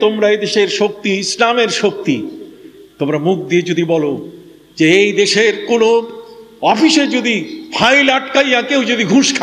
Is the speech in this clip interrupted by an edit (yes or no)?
no